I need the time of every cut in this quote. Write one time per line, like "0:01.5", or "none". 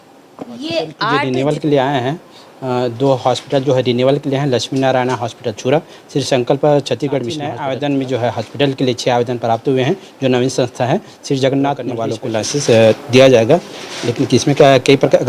0:01.0
0:07.5
0:12.1